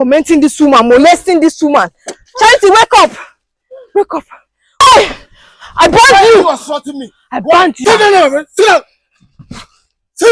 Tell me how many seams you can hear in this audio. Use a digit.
1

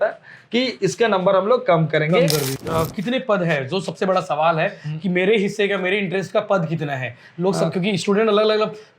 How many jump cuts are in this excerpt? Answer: 1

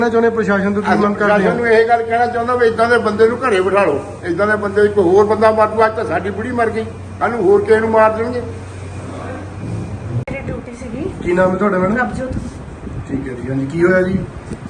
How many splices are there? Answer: 0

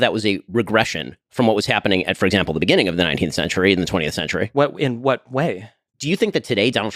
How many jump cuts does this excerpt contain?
1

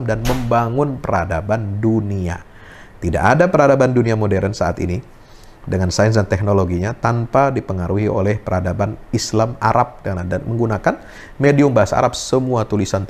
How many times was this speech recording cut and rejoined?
0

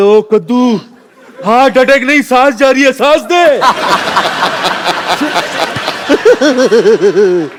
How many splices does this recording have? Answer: 0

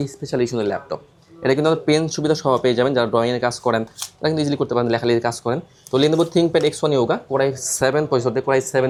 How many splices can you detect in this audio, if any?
0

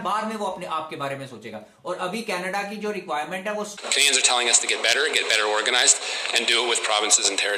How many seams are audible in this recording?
1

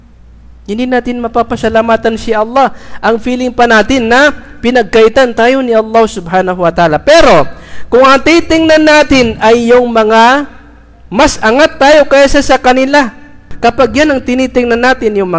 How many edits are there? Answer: 1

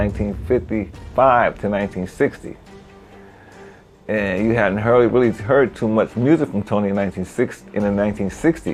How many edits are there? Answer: 0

